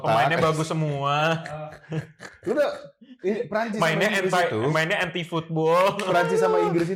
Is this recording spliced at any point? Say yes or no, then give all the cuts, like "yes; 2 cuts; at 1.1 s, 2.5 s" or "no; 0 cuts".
no; 0 cuts